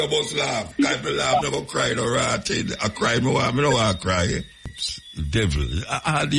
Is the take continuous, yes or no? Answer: no